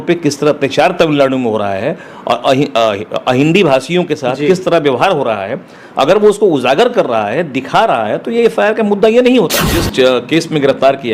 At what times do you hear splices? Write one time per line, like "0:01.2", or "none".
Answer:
0:09.8